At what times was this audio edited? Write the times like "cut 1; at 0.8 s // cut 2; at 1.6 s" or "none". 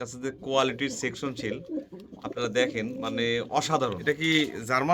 cut 1; at 4.0 s